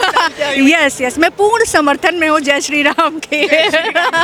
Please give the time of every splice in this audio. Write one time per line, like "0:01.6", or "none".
none